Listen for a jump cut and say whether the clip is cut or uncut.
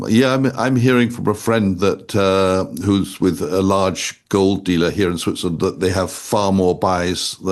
uncut